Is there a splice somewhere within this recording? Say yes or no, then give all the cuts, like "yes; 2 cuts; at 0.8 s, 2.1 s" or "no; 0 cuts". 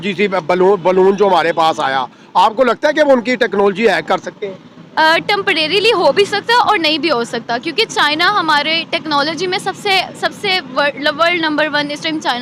no; 0 cuts